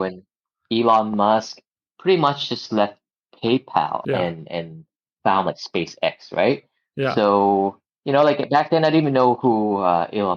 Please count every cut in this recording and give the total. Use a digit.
1